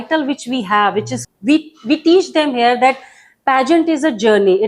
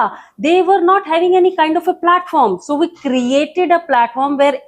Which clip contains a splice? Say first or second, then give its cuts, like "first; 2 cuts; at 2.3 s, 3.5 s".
first; 1 cut; at 1.2 s